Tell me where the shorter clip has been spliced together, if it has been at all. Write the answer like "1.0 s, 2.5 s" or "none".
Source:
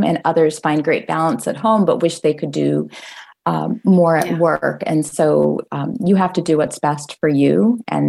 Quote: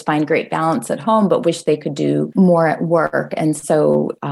2.3 s